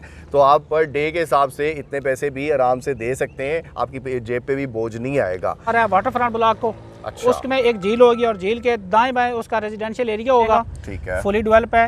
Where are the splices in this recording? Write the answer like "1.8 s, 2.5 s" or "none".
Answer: 5.7 s, 10.6 s